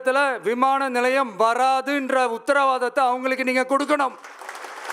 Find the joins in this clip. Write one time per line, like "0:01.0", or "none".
none